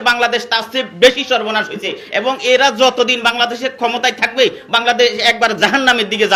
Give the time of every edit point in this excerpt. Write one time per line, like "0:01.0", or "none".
none